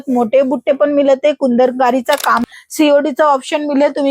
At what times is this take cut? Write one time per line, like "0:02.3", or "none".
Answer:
0:02.4